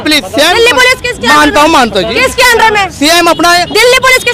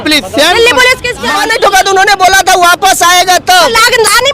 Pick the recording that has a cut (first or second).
second